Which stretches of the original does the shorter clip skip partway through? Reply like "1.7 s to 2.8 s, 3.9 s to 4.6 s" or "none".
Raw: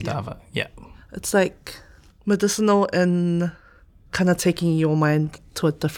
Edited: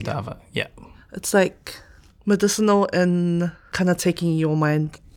3.6 s to 4.0 s